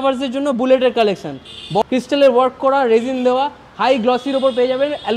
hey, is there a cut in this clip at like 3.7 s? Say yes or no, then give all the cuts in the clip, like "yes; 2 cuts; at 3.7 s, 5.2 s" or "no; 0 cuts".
no; 1 cut; at 1.8 s